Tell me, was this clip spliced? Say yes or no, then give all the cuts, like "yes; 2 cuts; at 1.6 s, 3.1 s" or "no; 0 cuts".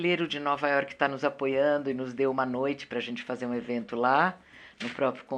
no; 0 cuts